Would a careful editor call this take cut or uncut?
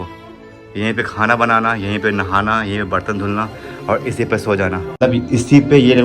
cut